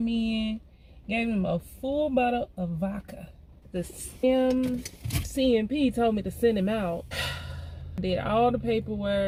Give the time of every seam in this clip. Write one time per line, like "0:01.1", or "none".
none